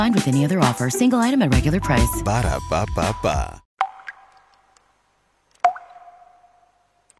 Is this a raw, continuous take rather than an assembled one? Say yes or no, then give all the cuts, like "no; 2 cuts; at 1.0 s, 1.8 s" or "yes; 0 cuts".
no; 1 cut; at 3.6 s